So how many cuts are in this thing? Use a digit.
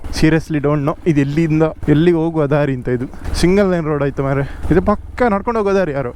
3